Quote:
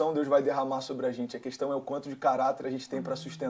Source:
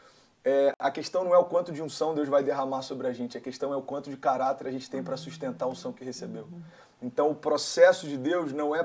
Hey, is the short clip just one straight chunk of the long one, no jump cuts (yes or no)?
yes